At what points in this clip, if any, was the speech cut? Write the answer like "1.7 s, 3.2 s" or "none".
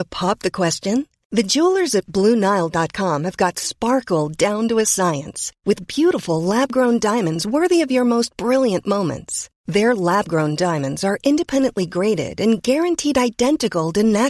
none